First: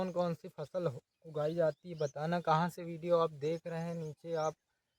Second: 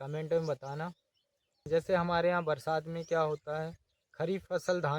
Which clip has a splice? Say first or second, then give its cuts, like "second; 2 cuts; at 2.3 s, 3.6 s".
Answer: second; 1 cut; at 1.6 s